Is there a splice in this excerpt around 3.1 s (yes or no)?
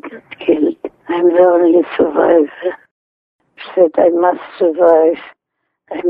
yes